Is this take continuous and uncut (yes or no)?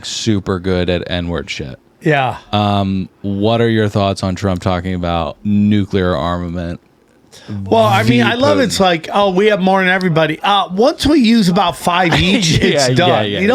yes